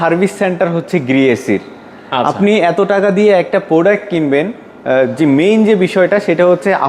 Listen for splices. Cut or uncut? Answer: uncut